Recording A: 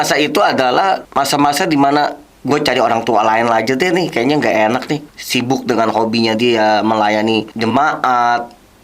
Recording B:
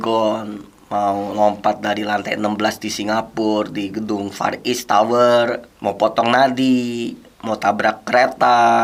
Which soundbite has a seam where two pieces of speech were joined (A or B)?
A